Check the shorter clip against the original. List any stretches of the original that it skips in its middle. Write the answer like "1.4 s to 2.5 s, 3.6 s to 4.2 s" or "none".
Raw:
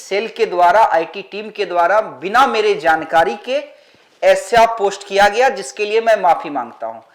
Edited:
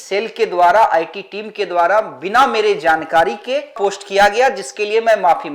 3.8 s to 4.8 s